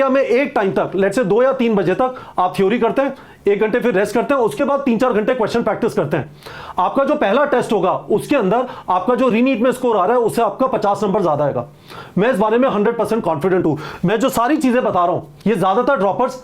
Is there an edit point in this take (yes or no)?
no